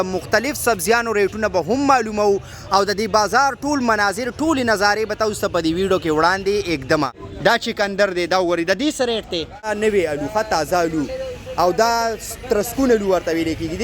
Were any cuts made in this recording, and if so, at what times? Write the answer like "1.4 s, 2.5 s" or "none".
7.2 s, 9.7 s